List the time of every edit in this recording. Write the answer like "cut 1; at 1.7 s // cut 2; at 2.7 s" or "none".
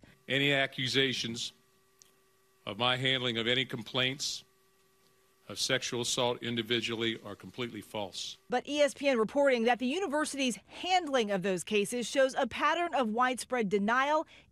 cut 1; at 2.1 s